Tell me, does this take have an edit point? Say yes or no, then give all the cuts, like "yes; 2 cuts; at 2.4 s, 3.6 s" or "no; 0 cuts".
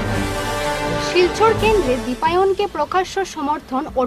no; 0 cuts